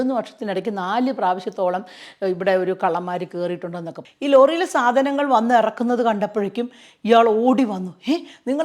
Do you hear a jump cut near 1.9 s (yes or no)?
no